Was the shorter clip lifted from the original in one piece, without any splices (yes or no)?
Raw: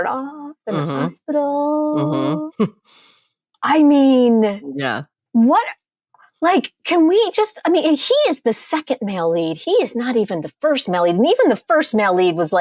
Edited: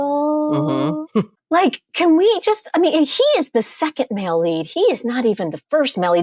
no